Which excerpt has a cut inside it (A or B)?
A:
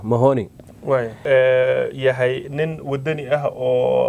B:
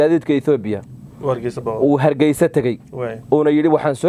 A